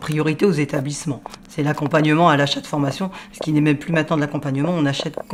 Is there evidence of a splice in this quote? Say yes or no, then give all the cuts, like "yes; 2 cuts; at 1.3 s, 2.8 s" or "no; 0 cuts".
no; 0 cuts